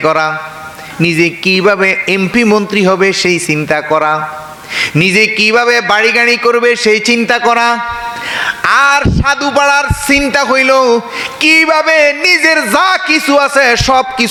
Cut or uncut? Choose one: uncut